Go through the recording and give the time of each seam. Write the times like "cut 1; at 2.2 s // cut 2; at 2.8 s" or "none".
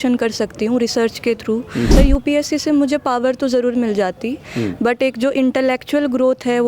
cut 1; at 1.9 s

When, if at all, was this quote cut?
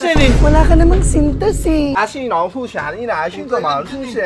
cut 1; at 2.0 s

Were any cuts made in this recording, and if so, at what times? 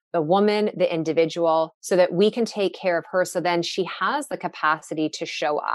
cut 1; at 4.3 s

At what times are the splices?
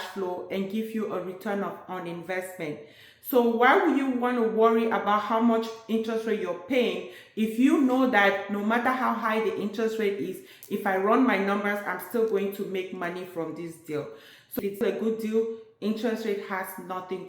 cut 1; at 14.8 s

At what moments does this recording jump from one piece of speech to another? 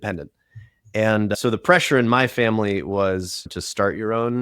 cut 1; at 1.3 s // cut 2; at 3.4 s

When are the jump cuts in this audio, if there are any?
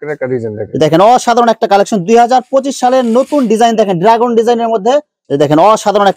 cut 1; at 5.2 s

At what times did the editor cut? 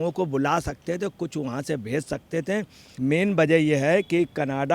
cut 1; at 2.8 s

